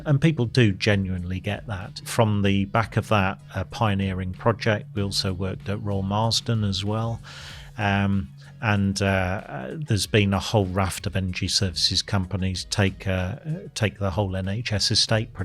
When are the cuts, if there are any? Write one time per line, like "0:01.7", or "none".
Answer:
0:02.0